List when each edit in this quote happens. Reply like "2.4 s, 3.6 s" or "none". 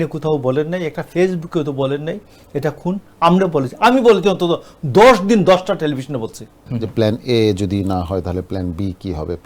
6.6 s